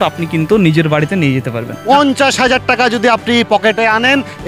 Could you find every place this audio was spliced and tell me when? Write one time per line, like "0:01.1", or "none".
0:01.7